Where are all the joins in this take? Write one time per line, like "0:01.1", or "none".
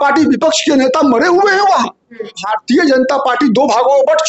0:02.5